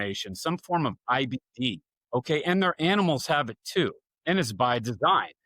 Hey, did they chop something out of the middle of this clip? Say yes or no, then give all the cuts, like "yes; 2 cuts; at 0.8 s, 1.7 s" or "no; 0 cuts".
yes; 2 cuts; at 1.9 s, 4.1 s